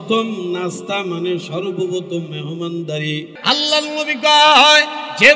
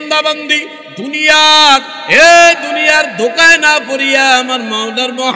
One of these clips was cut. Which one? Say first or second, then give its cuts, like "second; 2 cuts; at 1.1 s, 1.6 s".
first; 1 cut; at 3.3 s